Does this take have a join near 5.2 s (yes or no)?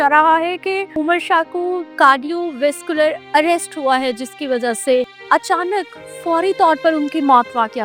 yes